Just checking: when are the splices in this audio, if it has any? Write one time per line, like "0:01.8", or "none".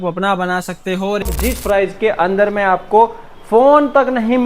0:01.2